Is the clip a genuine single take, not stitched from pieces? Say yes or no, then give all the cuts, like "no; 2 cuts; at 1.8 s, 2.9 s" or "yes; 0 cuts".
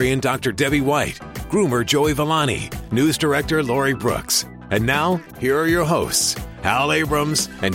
no; 1 cut; at 5.3 s